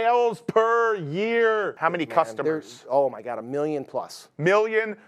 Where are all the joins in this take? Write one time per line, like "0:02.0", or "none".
0:01.8

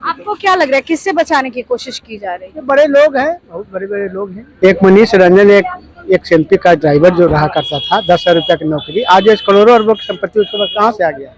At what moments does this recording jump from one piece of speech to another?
0:04.4

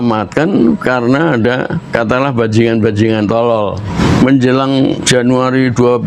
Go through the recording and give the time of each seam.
0:01.9
0:03.9
0:05.0

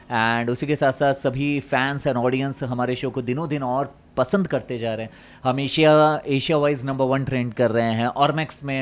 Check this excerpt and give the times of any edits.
none

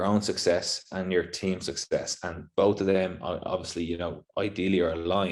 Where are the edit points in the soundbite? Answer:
none

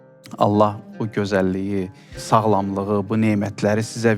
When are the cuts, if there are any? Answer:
0:02.2

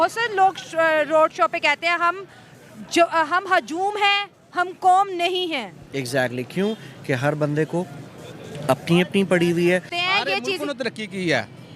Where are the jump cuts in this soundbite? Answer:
0:10.0

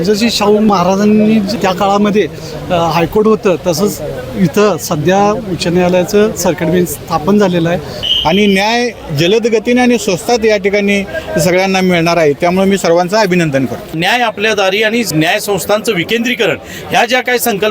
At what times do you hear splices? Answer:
0:00.7
0:01.5
0:08.0
0:13.9
0:15.1

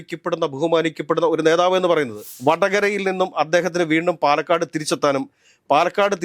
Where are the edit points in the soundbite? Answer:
0:02.2

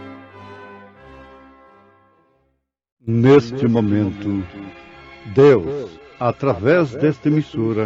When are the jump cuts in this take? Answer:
0:03.1

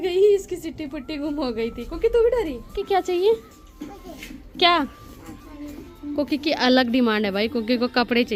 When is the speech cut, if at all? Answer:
none

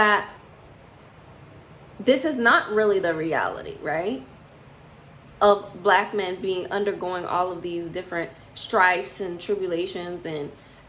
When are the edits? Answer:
none

